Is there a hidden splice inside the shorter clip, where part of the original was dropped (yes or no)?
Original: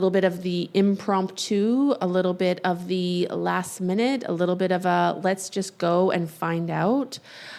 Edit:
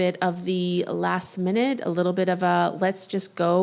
no